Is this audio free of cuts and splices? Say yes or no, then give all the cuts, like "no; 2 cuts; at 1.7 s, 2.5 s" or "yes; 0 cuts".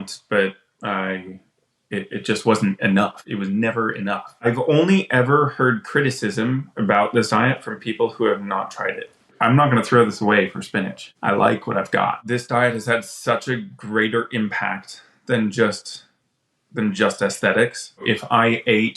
no; 6 cuts; at 3.2 s, 4.4 s, 9.4 s, 11.0 s, 12.2 s, 18.0 s